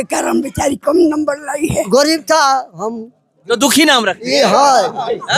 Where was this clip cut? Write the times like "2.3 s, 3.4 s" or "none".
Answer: 1.9 s